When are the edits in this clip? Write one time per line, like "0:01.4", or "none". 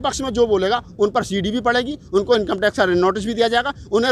none